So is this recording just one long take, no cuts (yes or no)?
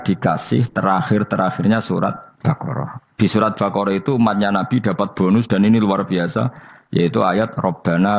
no